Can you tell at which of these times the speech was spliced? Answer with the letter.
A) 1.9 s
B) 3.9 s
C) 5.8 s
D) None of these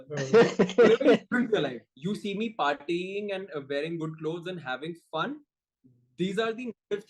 A